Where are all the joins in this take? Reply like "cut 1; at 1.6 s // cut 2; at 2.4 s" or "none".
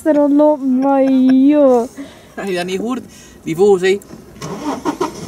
none